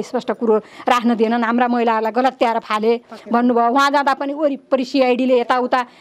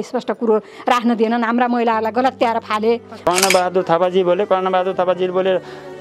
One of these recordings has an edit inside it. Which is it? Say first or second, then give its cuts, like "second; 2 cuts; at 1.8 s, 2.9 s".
second; 1 cut; at 3.3 s